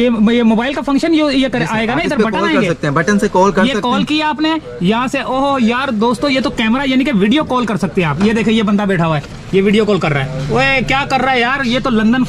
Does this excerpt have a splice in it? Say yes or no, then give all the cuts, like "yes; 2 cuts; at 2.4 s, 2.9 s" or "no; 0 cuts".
no; 0 cuts